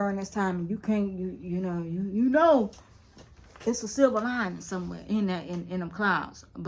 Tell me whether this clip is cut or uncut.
uncut